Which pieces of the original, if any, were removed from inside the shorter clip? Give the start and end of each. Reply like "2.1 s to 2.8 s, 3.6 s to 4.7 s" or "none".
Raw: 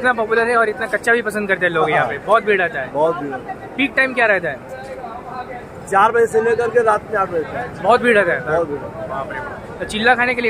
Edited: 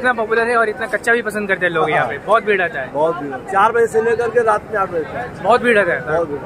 3.4 s to 5.8 s